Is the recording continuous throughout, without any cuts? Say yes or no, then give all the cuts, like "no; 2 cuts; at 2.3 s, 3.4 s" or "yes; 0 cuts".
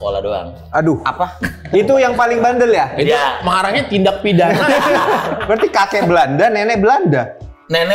no; 1 cut; at 5.4 s